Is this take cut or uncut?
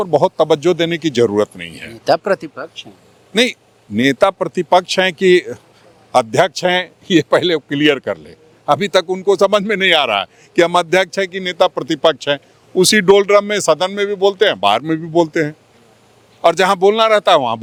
uncut